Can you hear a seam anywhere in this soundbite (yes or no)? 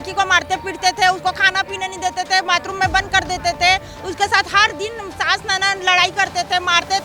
no